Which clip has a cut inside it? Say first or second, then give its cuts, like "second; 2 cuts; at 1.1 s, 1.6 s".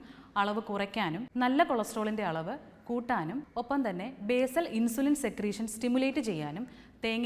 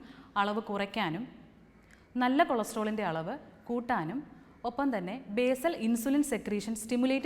first; 2 cuts; at 1.3 s, 3.5 s